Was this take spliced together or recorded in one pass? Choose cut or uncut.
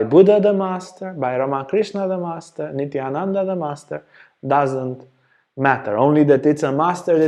uncut